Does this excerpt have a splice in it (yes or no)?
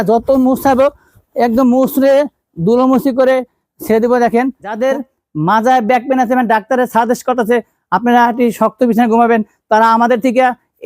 yes